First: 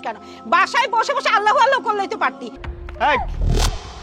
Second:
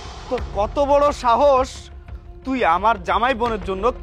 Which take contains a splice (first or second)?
first